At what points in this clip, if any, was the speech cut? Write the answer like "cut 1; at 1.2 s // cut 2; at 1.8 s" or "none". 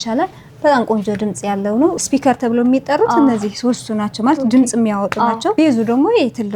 cut 1; at 2.0 s // cut 2; at 5.5 s